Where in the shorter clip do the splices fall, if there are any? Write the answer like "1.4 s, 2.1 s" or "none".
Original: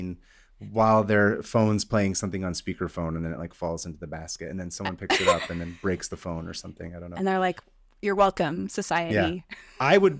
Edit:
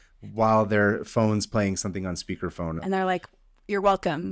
2.8 s

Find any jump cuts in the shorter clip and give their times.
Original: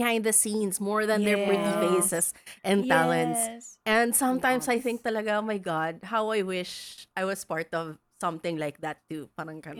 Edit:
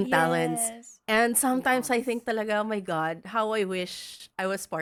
none

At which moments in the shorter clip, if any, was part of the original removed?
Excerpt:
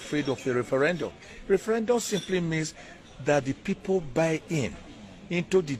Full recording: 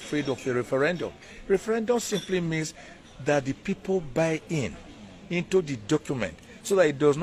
none

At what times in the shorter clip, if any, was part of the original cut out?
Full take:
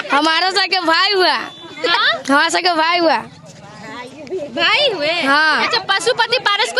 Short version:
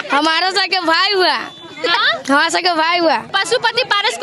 3.3 s

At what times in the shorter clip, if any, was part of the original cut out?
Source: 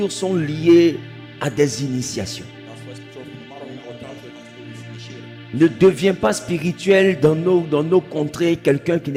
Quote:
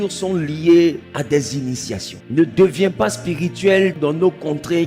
1.1 s, 2.1 s, 3.9 s

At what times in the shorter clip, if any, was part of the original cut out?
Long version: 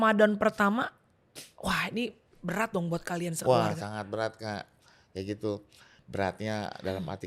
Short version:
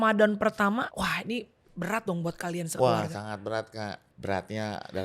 0.9 s, 4.1 s

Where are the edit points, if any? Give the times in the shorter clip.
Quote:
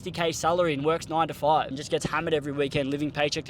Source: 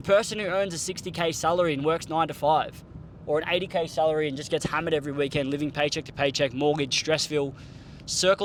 1.8 s

